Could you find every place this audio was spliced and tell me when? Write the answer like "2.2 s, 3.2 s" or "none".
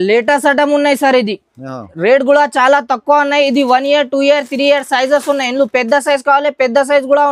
none